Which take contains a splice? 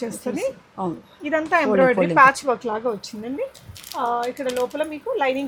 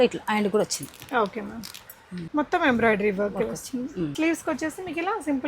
second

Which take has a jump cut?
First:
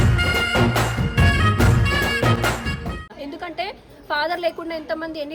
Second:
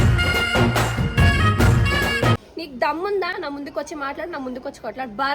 second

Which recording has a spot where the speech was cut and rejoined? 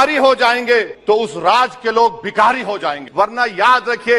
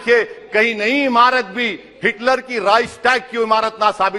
first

